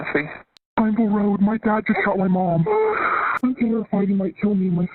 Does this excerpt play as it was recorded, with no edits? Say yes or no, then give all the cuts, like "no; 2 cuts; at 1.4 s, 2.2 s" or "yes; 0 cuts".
no; 1 cut; at 3.3 s